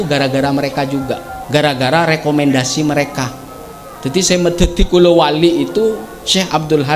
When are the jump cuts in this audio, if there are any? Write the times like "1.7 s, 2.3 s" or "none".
1.3 s